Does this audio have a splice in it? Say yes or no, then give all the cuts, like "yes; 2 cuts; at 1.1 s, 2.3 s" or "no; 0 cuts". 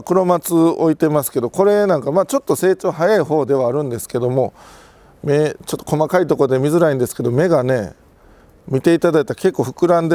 no; 0 cuts